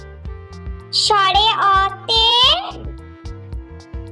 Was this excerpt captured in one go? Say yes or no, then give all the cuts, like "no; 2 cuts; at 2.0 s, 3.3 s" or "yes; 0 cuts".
no; 1 cut; at 1.0 s